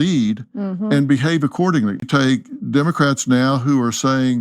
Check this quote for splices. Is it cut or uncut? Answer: cut